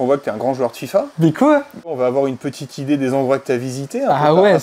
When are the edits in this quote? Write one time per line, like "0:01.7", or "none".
0:01.1
0:01.9